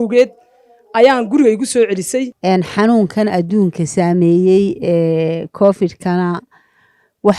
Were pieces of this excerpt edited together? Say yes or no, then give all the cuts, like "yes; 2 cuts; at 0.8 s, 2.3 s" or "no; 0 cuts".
yes; 1 cut; at 2.3 s